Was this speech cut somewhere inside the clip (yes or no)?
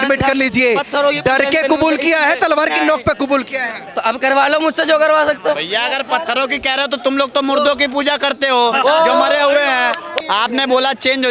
yes